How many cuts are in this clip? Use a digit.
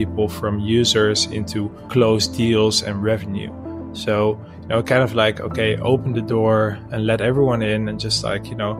0